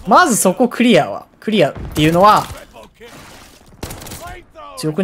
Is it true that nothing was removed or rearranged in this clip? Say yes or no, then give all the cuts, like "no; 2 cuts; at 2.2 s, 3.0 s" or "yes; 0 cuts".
no; 1 cut; at 3.1 s